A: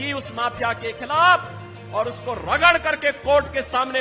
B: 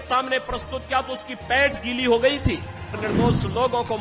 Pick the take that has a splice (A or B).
B